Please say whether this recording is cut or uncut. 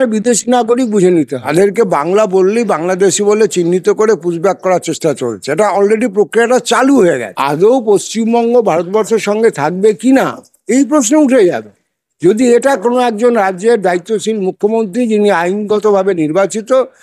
cut